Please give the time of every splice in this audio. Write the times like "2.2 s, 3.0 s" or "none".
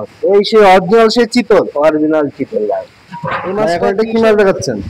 3.6 s